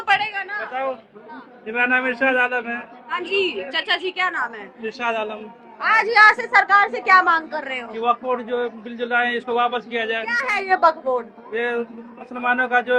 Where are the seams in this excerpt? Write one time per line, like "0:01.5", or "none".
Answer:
none